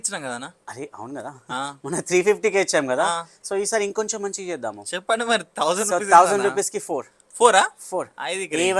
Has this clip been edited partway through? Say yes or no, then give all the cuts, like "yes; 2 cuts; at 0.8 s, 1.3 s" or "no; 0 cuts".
no; 0 cuts